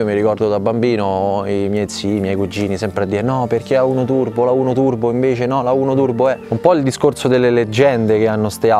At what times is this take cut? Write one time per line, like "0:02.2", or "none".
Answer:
0:06.5